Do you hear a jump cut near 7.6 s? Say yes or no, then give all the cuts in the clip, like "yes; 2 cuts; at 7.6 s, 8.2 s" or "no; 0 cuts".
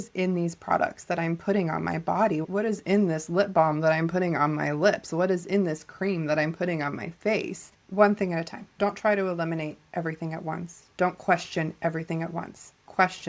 yes; 3 cuts; at 2.5 s, 7.6 s, 8.7 s